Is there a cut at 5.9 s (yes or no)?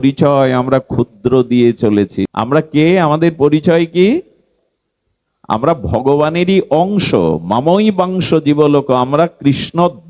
no